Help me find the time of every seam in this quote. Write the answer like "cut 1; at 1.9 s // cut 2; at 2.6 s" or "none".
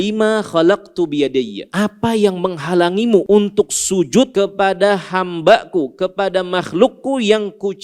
cut 1; at 1.6 s // cut 2; at 3.2 s // cut 3; at 4.3 s